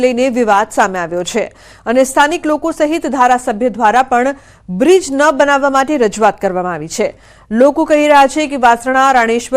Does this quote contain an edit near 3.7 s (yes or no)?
no